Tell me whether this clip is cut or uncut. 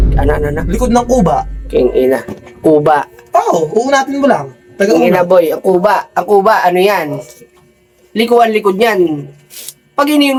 uncut